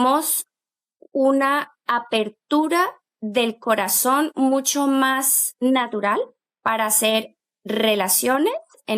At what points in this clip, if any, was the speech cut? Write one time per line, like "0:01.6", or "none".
0:06.4

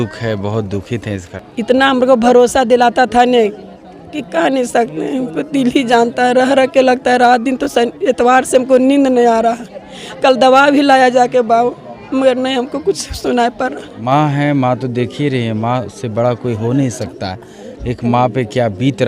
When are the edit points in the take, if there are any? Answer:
0:01.3
0:14.0

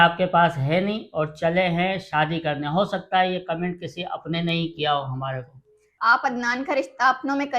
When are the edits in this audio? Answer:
0:05.9

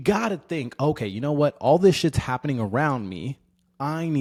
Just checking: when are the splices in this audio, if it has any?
none

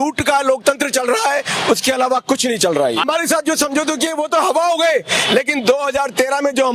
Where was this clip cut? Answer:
0:03.1

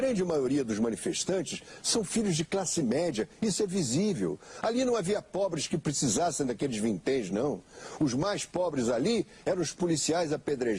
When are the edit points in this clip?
none

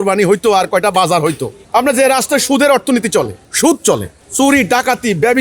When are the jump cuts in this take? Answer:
0:01.5
0:03.4
0:04.2

